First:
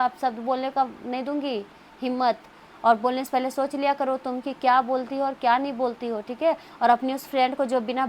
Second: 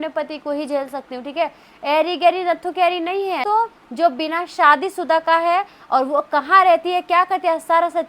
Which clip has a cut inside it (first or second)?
second